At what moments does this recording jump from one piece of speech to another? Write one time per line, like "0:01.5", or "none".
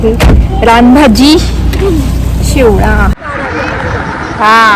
0:03.2

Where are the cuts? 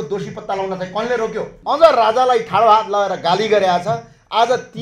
0:01.5

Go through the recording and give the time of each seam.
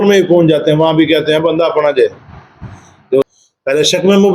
0:03.3

